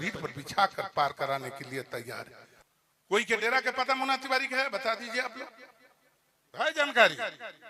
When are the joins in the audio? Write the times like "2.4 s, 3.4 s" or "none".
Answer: 2.5 s